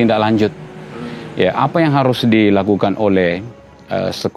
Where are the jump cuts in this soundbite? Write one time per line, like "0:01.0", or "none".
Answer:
none